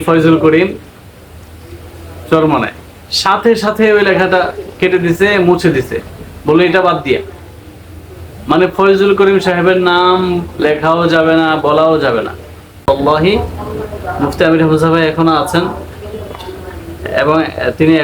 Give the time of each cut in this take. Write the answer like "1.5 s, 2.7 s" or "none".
12.9 s